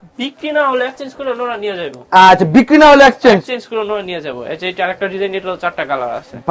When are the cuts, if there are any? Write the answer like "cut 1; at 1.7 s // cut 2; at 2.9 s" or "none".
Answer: none